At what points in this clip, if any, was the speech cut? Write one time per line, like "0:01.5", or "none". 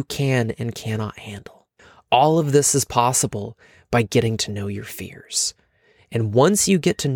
none